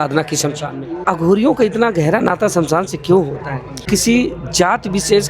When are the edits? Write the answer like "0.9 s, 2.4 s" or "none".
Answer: 1.0 s, 3.8 s